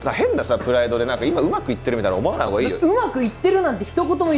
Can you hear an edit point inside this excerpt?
no; 0 cuts

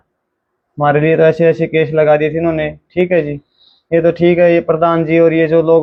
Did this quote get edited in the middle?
no; 0 cuts

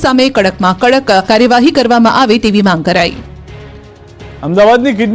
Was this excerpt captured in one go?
no; 1 cut; at 3.0 s

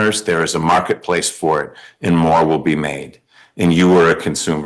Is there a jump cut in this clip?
no; 0 cuts

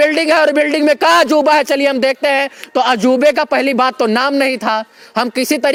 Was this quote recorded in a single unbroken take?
yes; 0 cuts

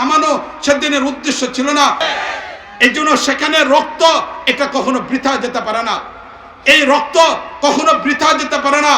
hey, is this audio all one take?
no; 1 cut; at 2.0 s

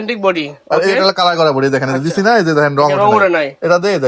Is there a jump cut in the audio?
no; 0 cuts

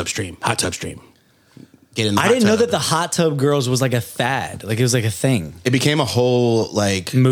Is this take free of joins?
yes; 0 cuts

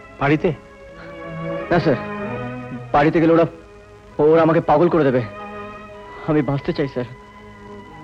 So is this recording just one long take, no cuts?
yes; 0 cuts

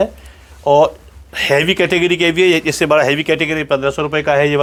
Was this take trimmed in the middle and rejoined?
no; 0 cuts

